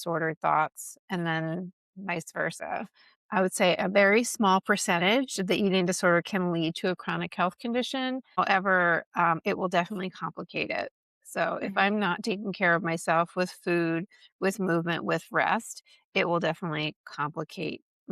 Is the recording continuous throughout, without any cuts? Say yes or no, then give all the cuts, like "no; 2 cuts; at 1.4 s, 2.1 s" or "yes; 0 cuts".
no; 3 cuts; at 1.0 s, 3.2 s, 8.4 s